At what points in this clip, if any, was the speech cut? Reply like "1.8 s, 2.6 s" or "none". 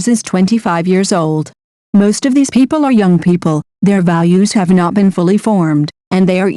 5.1 s